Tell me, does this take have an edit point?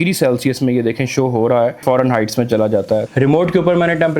yes; 2 cuts; at 1.8 s, 3.1 s

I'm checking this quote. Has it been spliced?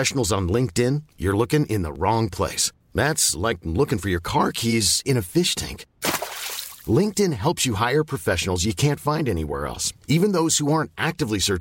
no; 0 cuts

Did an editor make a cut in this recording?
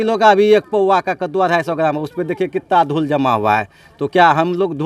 no; 0 cuts

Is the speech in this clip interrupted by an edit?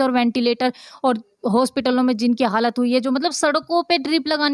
no; 0 cuts

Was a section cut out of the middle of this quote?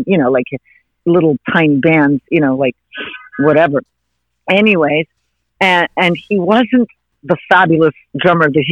yes; 1 cut; at 7.1 s

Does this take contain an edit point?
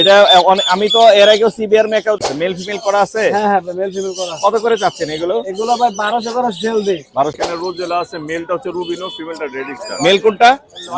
yes; 2 cuts; at 2.3 s, 7.4 s

